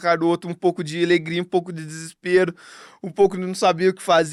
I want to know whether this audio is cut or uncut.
uncut